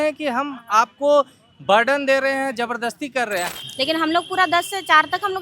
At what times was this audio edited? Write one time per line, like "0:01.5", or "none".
0:03.6

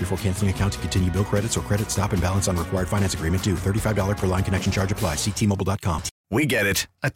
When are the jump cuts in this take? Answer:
0:06.1

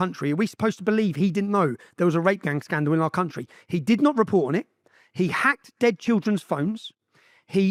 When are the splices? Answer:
none

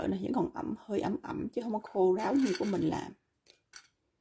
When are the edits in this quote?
none

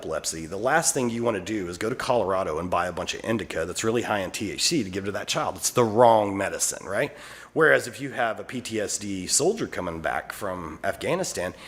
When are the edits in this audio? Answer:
none

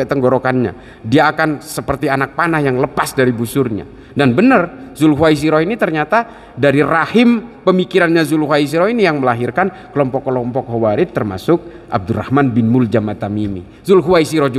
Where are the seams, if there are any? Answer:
none

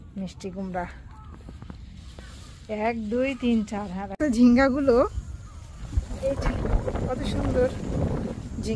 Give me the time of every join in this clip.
0:04.2

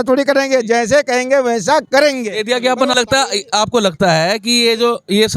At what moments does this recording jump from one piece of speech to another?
0:02.9

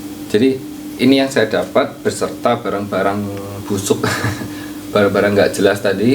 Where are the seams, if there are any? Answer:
0:04.8

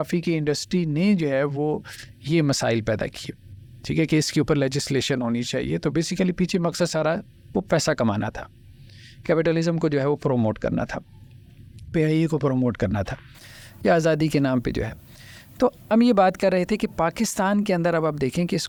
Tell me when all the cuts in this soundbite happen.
none

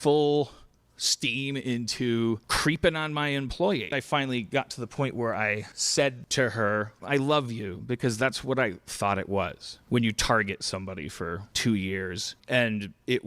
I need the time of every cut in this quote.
0:03.9
0:12.4

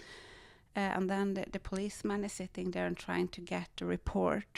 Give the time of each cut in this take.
none

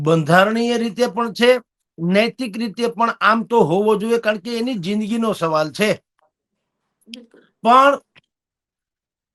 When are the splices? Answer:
none

